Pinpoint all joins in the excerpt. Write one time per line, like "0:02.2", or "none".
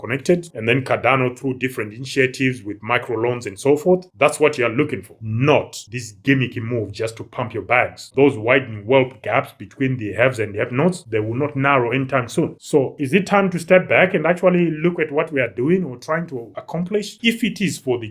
0:08.1
0:17.1

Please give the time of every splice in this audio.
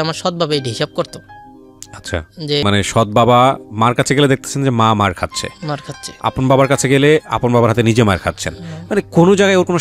0:02.6

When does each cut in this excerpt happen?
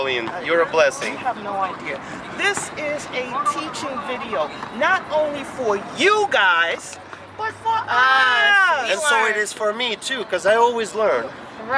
none

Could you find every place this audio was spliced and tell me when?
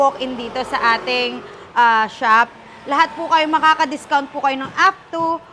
none

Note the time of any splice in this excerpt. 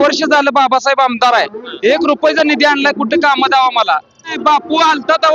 0:04.3

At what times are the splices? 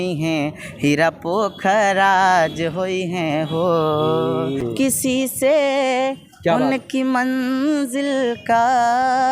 0:04.6

